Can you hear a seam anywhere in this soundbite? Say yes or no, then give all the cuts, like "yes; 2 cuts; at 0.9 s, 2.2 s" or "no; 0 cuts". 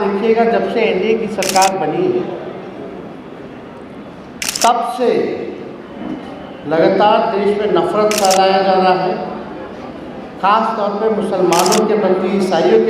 no; 0 cuts